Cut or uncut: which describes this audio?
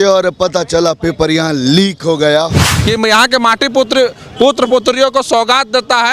cut